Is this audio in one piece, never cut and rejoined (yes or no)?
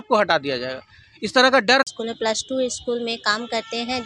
no